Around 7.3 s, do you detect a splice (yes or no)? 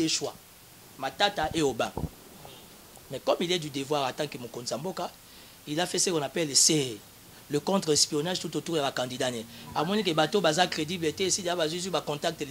no